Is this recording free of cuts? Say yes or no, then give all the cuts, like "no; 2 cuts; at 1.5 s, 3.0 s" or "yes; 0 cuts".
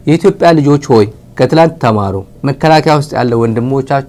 yes; 0 cuts